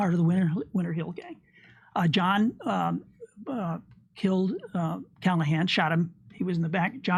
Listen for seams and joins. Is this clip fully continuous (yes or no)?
yes